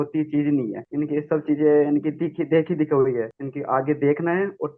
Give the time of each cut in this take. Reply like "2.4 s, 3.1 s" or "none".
none